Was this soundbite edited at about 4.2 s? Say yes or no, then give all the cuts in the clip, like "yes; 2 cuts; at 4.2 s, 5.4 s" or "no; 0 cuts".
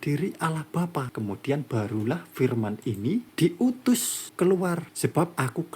yes; 4 cuts; at 1.1 s, 3.3 s, 4.2 s, 4.9 s